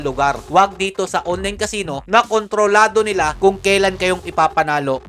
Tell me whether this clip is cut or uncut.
uncut